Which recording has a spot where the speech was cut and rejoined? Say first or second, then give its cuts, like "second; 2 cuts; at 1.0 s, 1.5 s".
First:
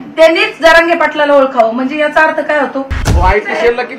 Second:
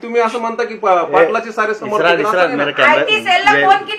first; 1 cut; at 3.0 s